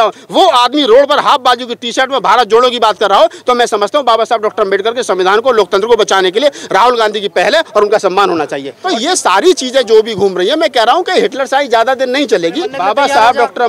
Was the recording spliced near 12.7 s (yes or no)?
yes